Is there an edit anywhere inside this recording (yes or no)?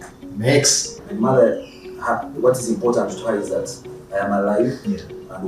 yes